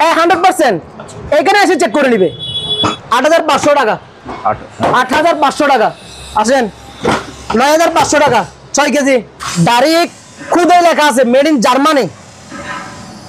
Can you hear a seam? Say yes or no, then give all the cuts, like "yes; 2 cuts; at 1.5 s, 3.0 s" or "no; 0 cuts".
yes; 2 cuts; at 3.0 s, 9.4 s